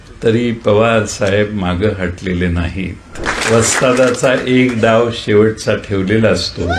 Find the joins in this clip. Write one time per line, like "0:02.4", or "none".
0:03.3